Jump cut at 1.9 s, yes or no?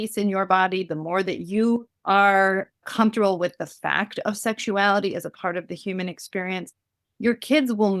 yes